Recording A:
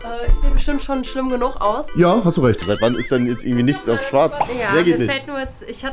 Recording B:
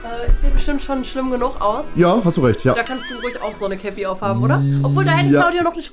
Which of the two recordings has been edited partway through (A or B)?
A